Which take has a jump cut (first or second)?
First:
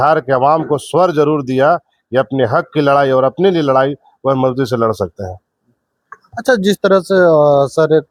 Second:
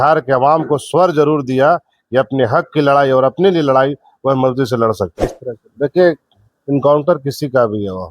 second